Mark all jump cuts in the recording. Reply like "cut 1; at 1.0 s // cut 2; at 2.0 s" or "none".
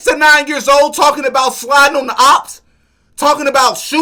none